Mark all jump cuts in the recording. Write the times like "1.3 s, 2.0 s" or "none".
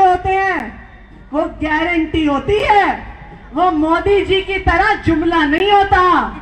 none